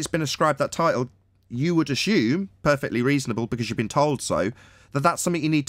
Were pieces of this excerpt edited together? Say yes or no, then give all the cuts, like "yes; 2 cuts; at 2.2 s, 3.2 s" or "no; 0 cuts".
no; 0 cuts